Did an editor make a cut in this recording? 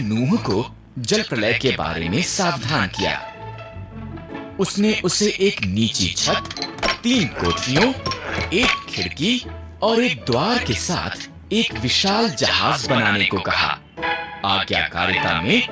no; 0 cuts

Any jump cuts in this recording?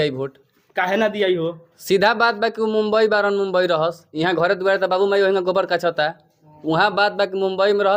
no; 0 cuts

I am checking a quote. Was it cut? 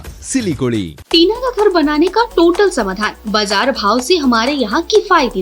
yes; 1 cut; at 1.0 s

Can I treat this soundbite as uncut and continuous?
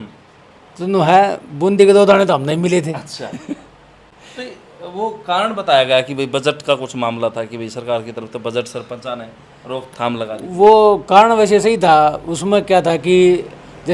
yes; 0 cuts

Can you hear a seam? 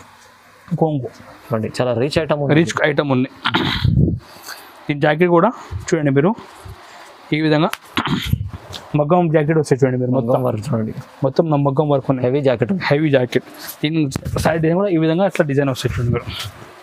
no; 0 cuts

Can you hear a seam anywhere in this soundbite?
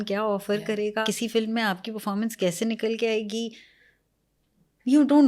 yes; 1 cut; at 1.1 s

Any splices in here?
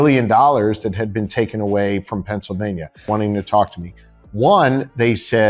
yes; 1 cut; at 2.9 s

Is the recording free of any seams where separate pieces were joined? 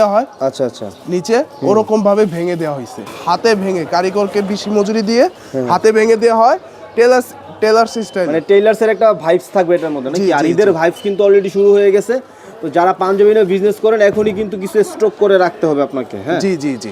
yes; 0 cuts

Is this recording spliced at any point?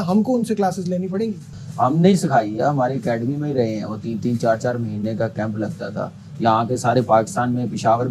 yes; 1 cut; at 1.6 s

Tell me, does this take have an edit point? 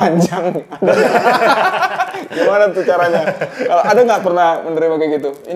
no; 0 cuts

